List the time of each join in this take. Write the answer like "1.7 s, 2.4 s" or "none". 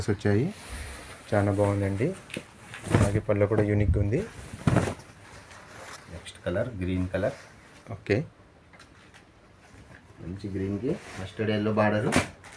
none